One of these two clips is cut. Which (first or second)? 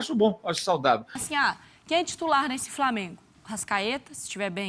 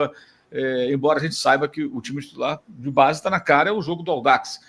first